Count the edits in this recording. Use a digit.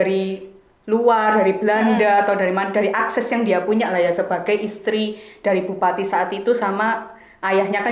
0